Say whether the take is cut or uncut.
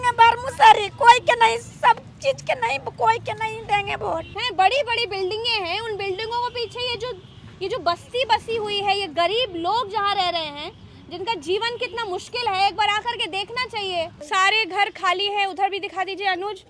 cut